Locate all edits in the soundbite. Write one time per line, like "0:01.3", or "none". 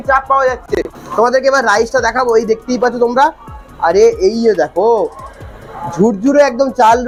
none

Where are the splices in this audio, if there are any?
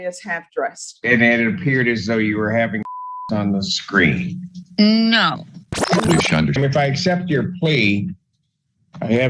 0:00.9
0:06.6

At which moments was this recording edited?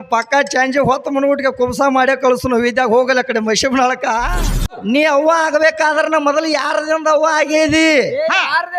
0:04.8

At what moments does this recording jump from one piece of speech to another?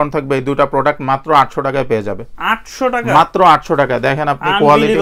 none

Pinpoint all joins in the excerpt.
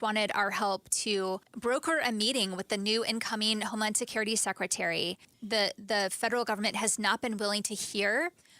0:01.5
0:05.3

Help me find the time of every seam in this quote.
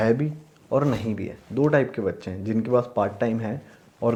none

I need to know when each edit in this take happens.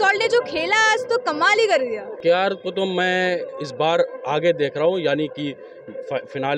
0:02.1

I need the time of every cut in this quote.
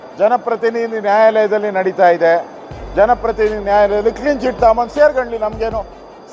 none

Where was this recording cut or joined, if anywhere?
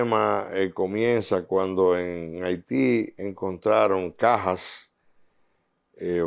none

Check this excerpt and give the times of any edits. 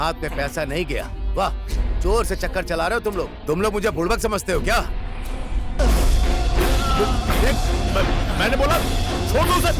0:05.8

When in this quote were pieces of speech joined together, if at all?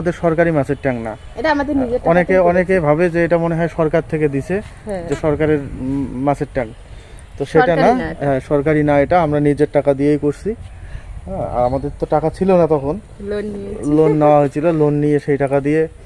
none

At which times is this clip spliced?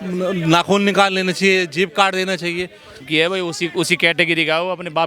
0:03.0

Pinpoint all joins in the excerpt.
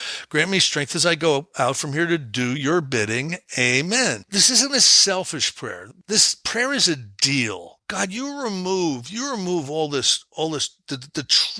0:04.3
0:05.8
0:07.9

